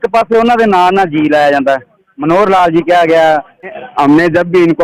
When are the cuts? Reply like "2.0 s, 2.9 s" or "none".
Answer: 3.8 s